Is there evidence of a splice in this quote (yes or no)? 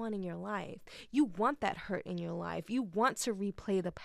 no